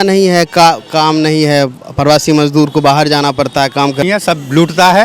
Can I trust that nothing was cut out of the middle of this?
no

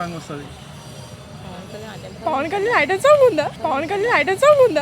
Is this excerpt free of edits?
yes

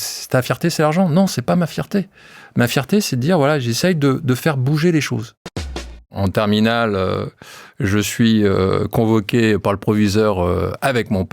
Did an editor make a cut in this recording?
yes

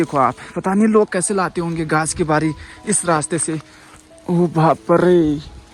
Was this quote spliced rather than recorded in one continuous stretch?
no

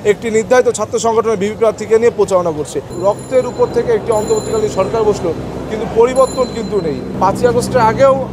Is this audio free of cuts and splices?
no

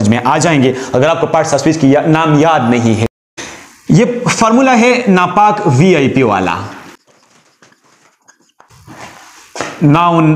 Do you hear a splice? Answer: no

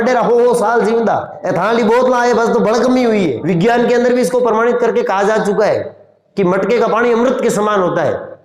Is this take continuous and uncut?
no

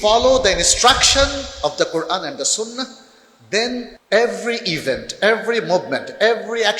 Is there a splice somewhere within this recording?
yes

